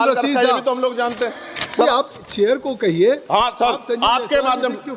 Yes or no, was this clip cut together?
yes